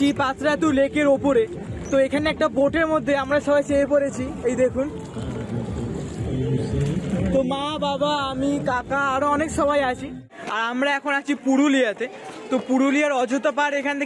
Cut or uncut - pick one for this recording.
cut